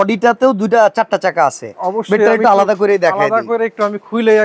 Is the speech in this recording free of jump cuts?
yes; 0 cuts

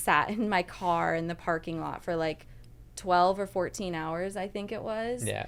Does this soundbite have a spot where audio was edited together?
no; 0 cuts

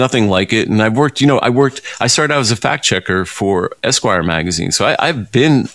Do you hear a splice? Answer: no; 0 cuts

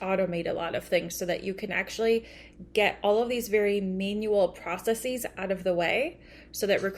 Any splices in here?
no; 0 cuts

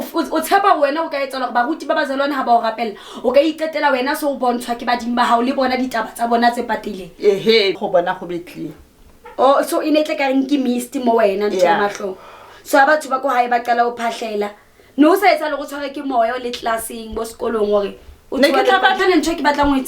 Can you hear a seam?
yes; 2 cuts; at 7.8 s, 19.0 s

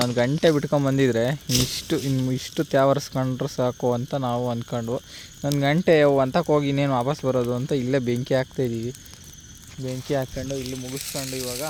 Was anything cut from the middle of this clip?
no; 0 cuts

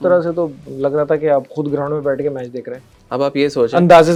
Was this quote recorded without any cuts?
yes; 0 cuts

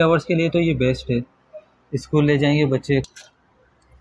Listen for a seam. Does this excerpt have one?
yes; 1 cut; at 3.1 s

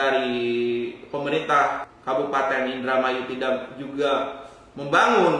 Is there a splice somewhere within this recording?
yes; 1 cut; at 1.9 s

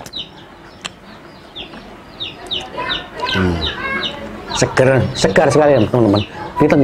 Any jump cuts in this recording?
no; 0 cuts

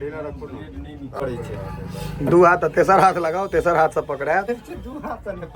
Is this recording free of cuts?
no; 1 cut; at 1.0 s

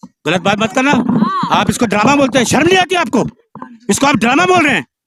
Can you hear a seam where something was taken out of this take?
no; 0 cuts

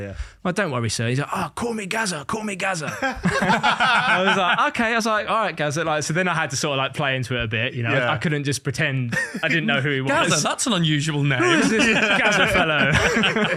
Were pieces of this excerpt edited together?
no; 0 cuts

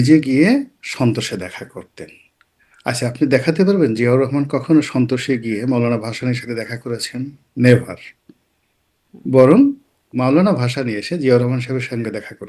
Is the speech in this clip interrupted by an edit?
no; 0 cuts

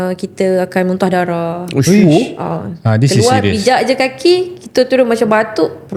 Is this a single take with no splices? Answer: yes; 0 cuts

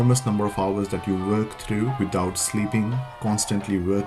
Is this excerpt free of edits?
yes; 0 cuts

